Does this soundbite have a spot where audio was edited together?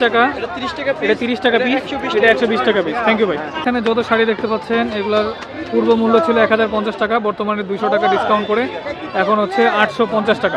yes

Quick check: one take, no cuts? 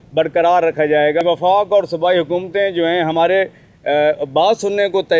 no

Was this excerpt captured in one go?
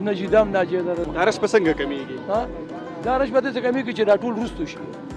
no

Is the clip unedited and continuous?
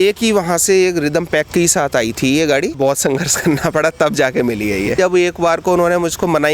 no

